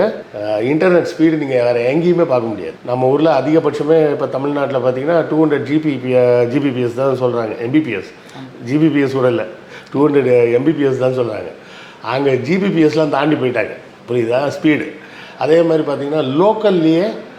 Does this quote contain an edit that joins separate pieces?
no; 0 cuts

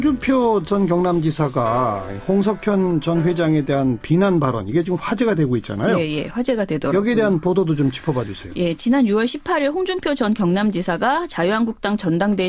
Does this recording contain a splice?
no; 0 cuts

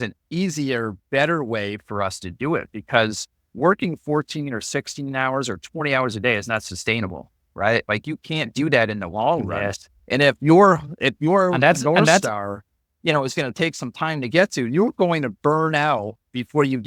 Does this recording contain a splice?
no; 0 cuts

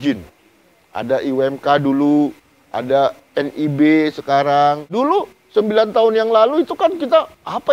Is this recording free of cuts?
no; 1 cut; at 4.9 s

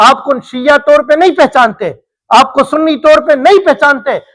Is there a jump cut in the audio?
no; 0 cuts

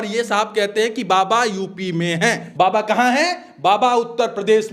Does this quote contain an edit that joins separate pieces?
yes; 1 cut; at 2.5 s

